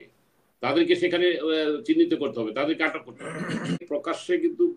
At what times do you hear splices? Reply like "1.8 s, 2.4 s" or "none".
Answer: 3.9 s